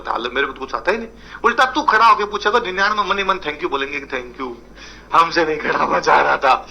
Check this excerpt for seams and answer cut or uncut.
cut